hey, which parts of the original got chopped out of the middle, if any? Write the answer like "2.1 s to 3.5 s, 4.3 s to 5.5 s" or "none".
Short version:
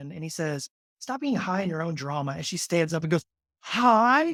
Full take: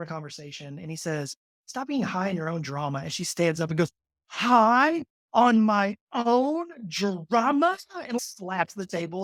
none